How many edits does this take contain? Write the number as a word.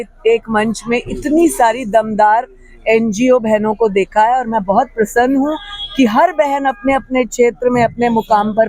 zero